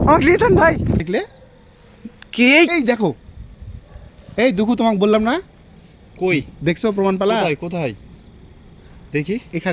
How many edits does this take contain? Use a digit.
1